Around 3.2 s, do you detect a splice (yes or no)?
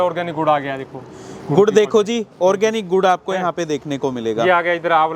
no